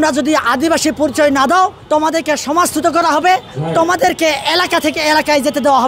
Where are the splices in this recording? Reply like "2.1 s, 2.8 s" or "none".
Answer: 1.8 s, 3.6 s